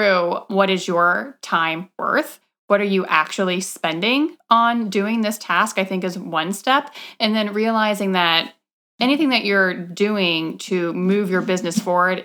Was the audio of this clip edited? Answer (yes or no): no